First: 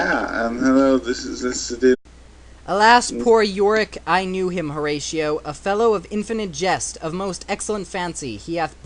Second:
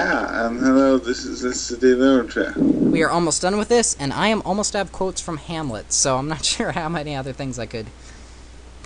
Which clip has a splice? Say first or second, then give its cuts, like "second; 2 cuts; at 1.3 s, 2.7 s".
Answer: second; 1 cut; at 2.0 s